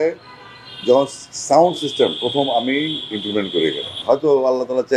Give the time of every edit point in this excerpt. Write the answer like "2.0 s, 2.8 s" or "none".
4.0 s